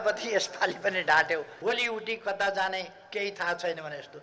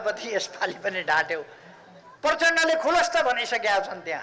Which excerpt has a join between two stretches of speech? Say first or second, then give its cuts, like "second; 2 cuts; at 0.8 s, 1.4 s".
first; 1 cut; at 1.5 s